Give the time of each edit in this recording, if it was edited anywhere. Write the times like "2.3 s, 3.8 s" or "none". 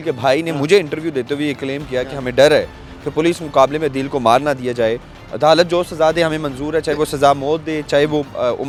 none